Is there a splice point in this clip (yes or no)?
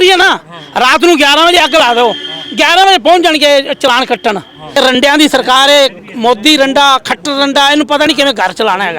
yes